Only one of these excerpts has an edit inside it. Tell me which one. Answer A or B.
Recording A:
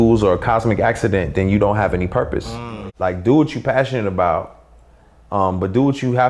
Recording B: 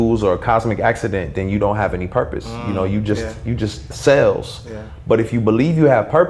A